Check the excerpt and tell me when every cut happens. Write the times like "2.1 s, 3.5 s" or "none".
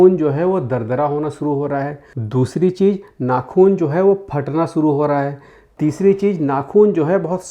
none